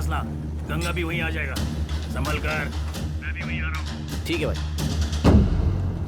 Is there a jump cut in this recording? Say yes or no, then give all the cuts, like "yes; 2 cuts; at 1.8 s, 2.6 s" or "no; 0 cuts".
no; 0 cuts